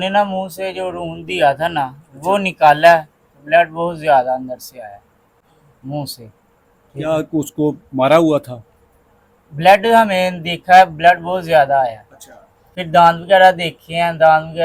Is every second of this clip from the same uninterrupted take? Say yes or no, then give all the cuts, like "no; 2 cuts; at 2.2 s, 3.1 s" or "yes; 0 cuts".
yes; 0 cuts